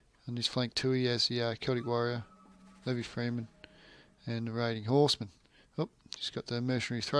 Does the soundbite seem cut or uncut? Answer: cut